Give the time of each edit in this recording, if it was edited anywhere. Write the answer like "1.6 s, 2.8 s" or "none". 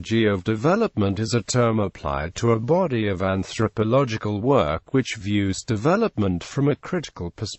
0.9 s